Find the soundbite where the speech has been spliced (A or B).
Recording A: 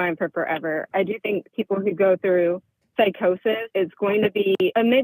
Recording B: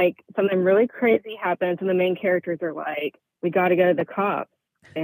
A